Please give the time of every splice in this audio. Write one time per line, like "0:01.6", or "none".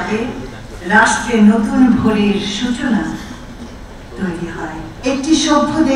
0:04.9